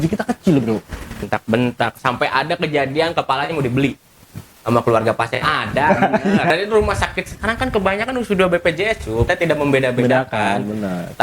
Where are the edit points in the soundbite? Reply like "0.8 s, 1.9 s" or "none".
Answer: 1.2 s, 6.5 s, 9.3 s